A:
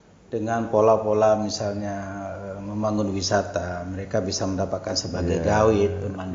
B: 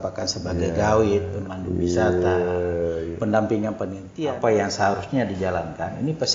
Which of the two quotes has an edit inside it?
B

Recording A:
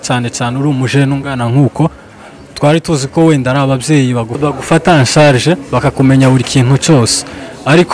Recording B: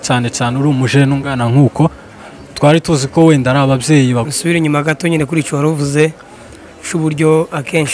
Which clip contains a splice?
B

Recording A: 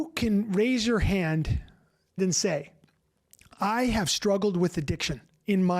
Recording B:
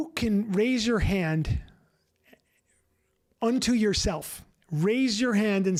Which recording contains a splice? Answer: A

